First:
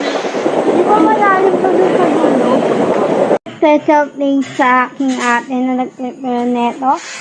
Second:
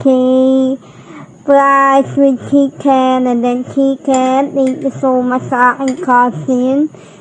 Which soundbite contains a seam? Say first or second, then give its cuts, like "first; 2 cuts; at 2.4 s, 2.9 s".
first; 1 cut; at 3.5 s